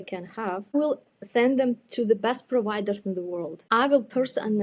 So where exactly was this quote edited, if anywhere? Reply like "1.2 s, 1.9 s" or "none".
0.7 s, 3.5 s